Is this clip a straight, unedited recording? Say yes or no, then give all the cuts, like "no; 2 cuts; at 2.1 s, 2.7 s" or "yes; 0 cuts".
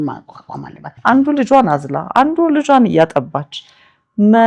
no; 1 cut; at 0.9 s